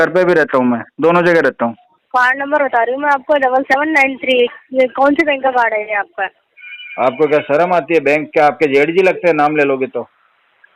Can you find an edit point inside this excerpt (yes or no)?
yes